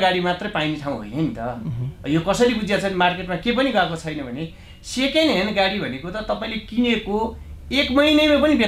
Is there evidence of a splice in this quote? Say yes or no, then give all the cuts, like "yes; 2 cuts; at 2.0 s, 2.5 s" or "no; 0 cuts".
no; 0 cuts